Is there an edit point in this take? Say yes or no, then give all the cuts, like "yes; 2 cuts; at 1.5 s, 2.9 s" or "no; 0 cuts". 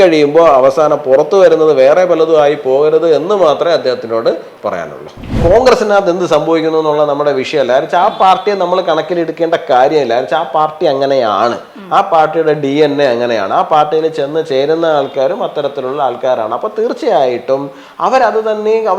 yes; 1 cut; at 5.4 s